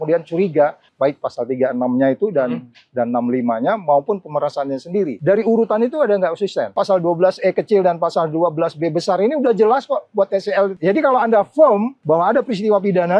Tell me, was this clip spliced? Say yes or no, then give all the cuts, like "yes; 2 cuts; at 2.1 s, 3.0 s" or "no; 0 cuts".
yes; 5 cuts; at 0.9 s, 5.2 s, 6.8 s, 10.8 s, 11.9 s